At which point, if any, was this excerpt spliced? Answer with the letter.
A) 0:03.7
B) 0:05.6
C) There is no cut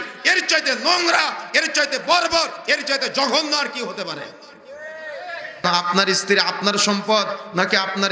B